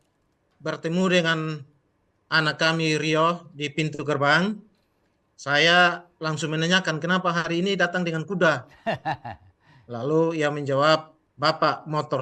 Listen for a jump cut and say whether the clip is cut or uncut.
cut